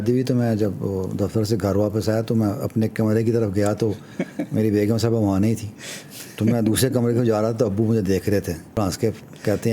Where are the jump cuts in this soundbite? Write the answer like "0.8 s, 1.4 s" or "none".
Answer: 8.8 s